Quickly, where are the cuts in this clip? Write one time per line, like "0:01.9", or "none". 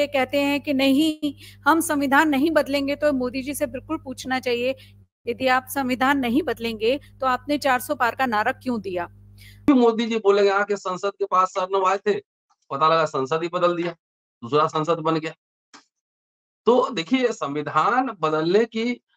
0:09.7